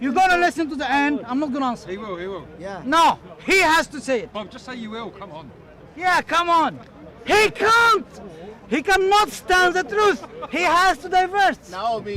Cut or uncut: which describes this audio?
uncut